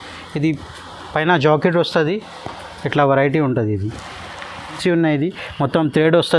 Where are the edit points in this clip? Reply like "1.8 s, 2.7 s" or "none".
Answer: 4.8 s